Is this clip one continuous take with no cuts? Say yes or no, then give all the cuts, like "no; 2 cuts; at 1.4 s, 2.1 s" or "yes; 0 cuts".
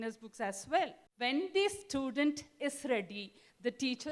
no; 1 cut; at 1.1 s